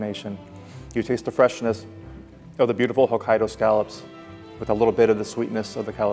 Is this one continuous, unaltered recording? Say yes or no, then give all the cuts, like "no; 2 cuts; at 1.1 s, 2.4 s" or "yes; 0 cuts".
yes; 0 cuts